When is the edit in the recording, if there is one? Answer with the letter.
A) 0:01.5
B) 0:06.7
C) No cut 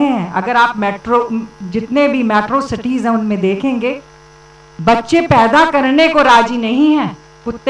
C